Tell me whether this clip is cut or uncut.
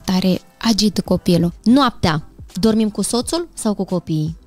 cut